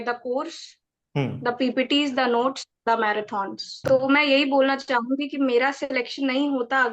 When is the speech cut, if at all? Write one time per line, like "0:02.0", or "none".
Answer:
0:03.7